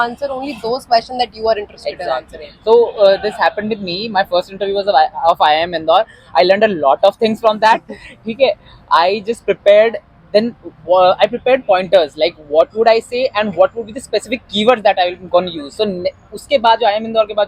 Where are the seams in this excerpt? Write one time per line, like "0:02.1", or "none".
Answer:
none